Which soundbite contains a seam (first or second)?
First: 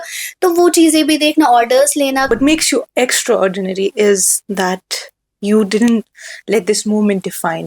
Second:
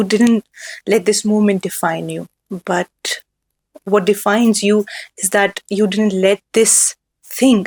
first